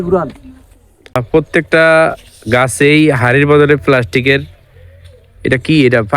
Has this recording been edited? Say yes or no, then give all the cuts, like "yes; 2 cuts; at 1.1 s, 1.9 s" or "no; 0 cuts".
yes; 1 cut; at 1.2 s